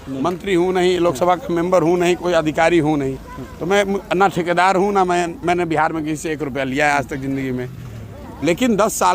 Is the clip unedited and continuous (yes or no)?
yes